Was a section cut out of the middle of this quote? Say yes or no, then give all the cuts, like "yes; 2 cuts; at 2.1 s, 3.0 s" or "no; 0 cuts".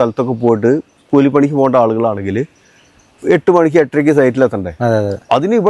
no; 0 cuts